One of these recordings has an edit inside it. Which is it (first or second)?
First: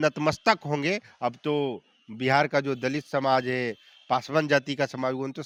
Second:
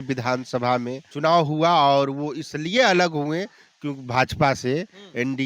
second